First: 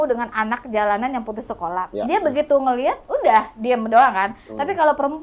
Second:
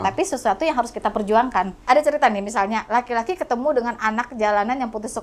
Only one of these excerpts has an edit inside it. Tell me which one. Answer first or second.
second